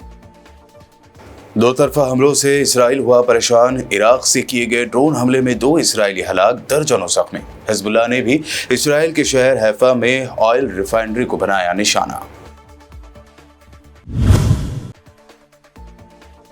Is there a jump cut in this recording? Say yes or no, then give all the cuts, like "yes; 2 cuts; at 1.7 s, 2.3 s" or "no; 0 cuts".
yes; 1 cut; at 0.9 s